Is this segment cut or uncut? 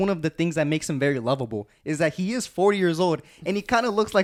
uncut